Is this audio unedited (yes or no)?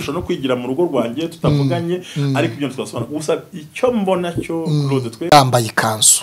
no